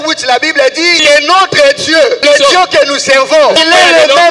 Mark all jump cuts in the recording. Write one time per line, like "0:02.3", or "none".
0:00.9
0:02.2
0:03.6

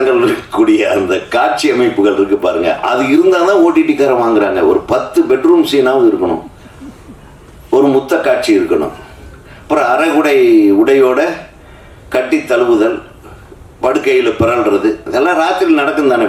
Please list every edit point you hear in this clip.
none

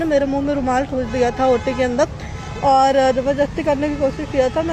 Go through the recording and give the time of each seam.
none

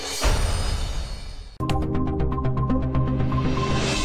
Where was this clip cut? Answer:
0:01.4

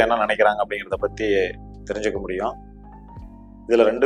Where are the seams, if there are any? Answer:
none

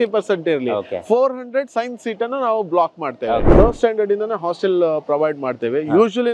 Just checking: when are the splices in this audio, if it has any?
0:03.5

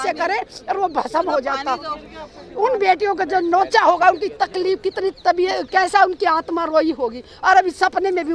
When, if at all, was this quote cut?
none

